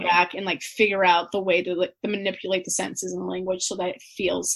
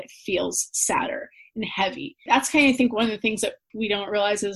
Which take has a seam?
second; 2 cuts; at 2.2 s, 3.7 s

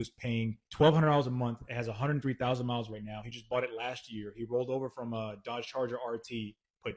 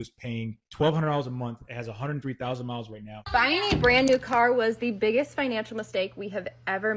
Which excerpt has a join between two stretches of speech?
second; 1 cut; at 3.2 s

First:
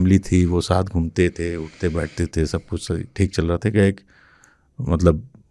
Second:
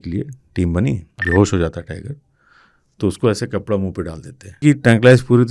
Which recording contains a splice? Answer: second; 2 cuts; at 1.1 s, 4.6 s

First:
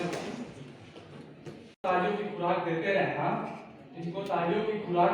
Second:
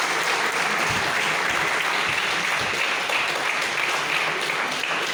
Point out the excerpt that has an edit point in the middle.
first; 1 cut; at 1.8 s

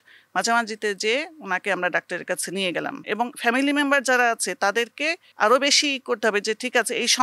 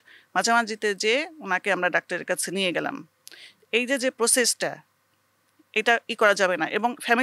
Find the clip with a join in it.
first; 2 cuts; at 3.0 s, 5.2 s

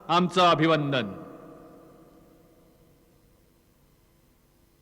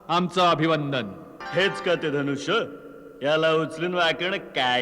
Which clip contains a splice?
second; 1 cut; at 1.3 s

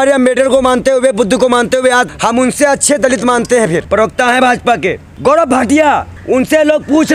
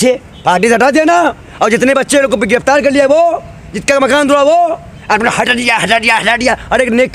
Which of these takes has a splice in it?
first; 4 cuts; at 2.1 s, 3.8 s, 5.1 s, 6.1 s

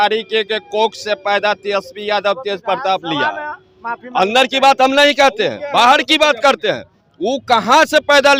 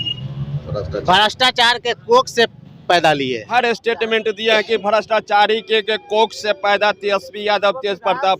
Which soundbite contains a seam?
second; 1 cut; at 3.5 s

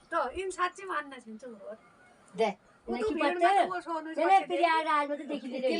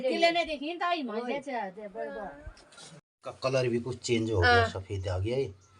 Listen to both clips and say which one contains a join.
second; 1 cut; at 3.0 s

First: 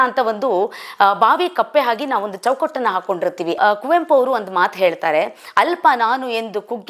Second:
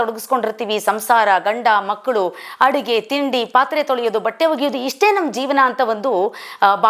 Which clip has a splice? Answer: first; 1 cut; at 3.5 s

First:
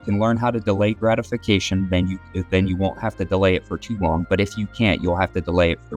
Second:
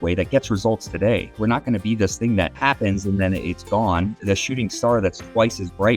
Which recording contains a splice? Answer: second; 2 cuts; at 1.3 s, 2.5 s

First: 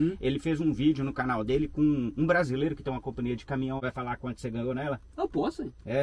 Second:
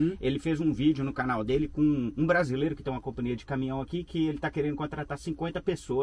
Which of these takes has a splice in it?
first; 1 cut; at 3.8 s

